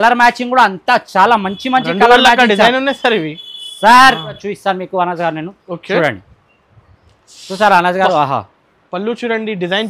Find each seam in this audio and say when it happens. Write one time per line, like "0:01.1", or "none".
0:04.4